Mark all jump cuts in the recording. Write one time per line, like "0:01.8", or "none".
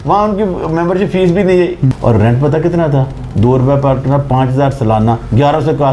0:01.8